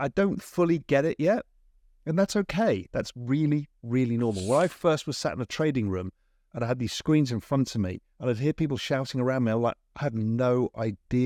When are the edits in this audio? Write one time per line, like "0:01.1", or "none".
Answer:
none